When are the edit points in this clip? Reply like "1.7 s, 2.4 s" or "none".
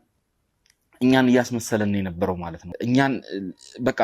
2.7 s